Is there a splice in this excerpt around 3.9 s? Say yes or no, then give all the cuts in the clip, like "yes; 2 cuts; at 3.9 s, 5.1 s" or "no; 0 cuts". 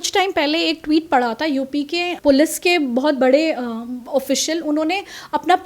no; 1 cut; at 2.1 s